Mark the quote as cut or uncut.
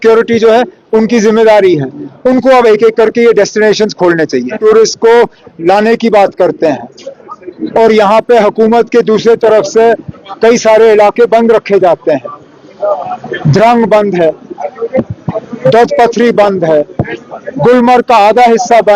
cut